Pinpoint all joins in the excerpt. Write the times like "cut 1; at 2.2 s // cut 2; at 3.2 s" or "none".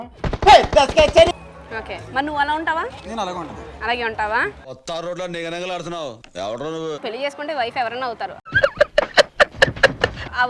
cut 1; at 7.0 s